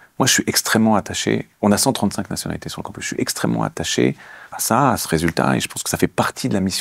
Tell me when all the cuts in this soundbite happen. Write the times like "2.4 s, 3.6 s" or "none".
none